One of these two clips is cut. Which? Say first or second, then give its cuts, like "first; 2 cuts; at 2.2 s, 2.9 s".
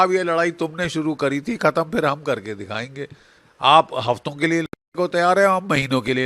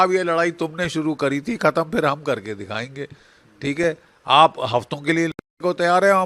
first; 1 cut; at 3.4 s